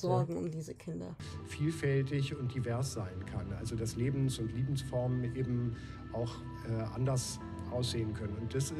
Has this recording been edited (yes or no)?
yes